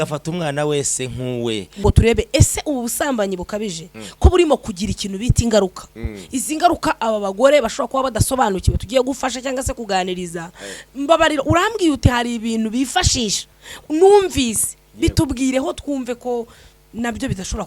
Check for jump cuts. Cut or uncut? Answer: cut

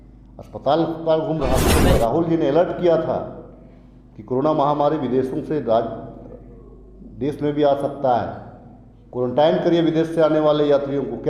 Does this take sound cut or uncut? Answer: cut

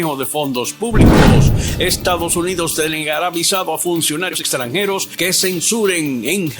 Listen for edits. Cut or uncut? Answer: cut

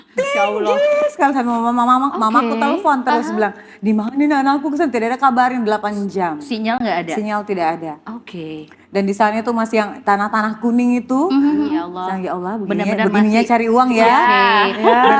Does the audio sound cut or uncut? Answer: uncut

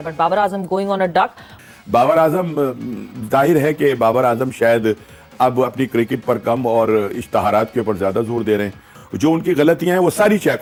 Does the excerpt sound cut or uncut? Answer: uncut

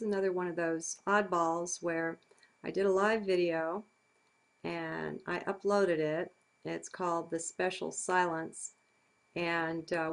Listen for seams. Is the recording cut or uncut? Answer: uncut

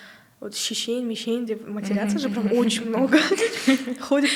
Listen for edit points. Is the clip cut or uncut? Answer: uncut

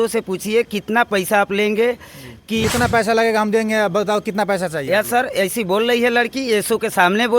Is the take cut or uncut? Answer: cut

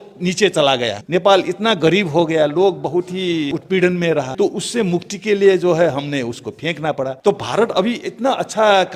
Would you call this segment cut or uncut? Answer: cut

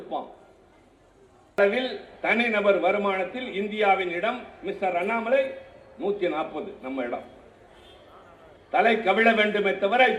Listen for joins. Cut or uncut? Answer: cut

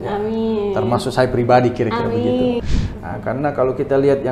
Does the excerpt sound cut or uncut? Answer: cut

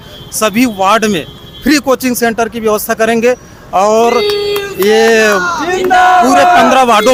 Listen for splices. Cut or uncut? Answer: uncut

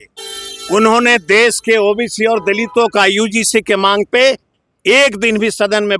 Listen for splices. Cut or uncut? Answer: uncut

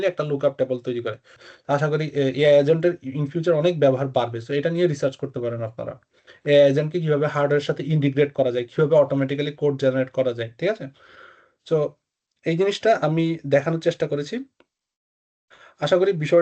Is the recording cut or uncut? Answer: cut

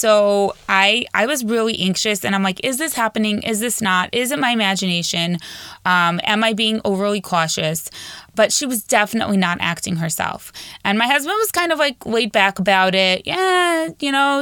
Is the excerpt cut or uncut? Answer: uncut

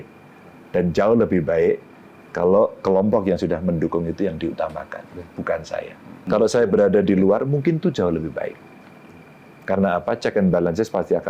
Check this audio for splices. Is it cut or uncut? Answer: cut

